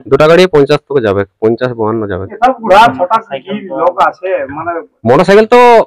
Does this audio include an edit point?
no; 0 cuts

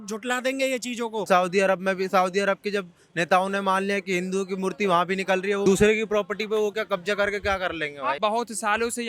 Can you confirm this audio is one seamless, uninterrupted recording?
no; 3 cuts; at 1.2 s, 5.6 s, 8.2 s

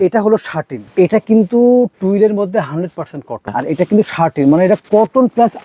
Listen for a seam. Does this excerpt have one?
yes; 2 cuts; at 0.9 s, 3.5 s

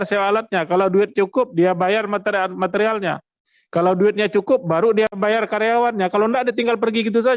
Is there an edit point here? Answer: no; 0 cuts

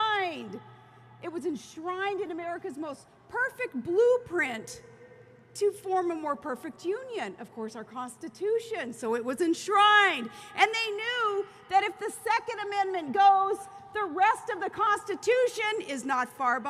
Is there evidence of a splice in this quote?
yes; 1 cut; at 11.7 s

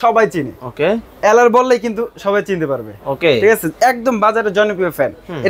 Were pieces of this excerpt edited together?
no; 0 cuts

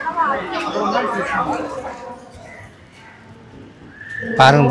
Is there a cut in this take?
yes; 1 cut; at 1.7 s

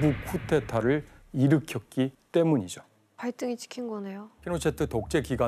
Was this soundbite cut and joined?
yes; 1 cut; at 4.4 s

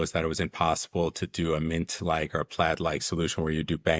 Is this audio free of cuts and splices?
yes; 0 cuts

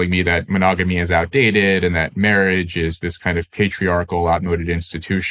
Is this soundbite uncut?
yes; 0 cuts

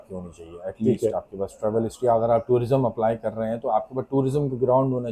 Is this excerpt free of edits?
yes; 0 cuts

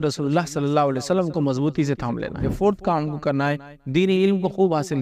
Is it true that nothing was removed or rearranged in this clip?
no; 1 cut; at 2.5 s

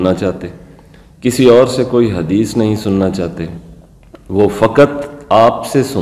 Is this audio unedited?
yes; 0 cuts

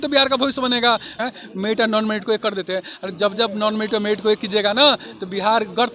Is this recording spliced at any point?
yes; 1 cut; at 1.1 s

